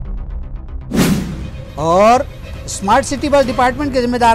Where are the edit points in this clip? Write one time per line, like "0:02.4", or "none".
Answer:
0:01.1